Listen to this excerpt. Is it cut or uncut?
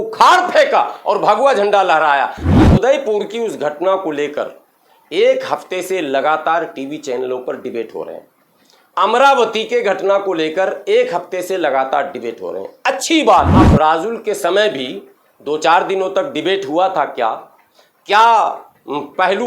cut